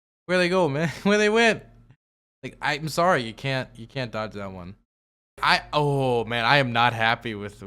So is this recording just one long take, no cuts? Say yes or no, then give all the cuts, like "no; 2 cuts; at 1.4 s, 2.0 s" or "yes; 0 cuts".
no; 1 cut; at 5.4 s